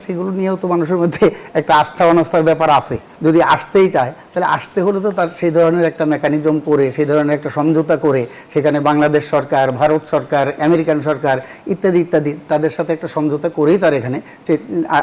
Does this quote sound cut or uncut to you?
cut